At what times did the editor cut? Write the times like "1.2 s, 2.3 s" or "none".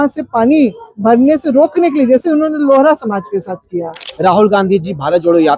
4.1 s